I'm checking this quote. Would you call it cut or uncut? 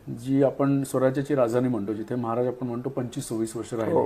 uncut